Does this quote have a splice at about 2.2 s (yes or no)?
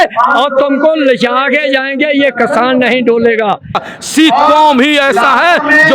no